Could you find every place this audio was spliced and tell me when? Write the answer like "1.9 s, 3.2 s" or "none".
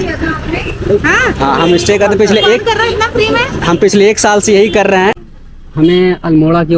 5.2 s